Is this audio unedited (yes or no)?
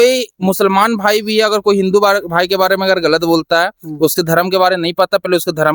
yes